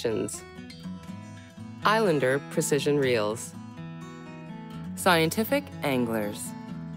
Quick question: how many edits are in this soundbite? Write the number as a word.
two